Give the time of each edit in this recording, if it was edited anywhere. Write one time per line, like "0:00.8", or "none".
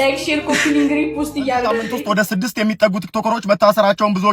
0:01.8